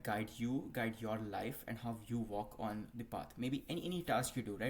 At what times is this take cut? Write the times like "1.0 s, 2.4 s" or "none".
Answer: none